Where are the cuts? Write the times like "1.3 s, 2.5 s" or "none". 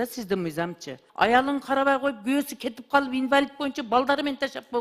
1.0 s